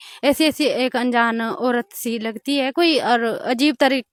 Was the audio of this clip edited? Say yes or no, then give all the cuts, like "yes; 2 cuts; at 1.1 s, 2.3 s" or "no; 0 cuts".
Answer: no; 0 cuts